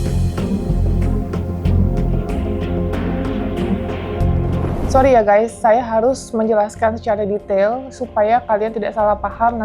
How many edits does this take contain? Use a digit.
1